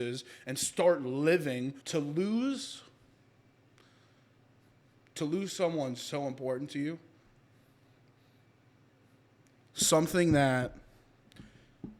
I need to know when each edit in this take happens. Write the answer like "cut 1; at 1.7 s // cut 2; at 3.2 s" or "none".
cut 1; at 1.8 s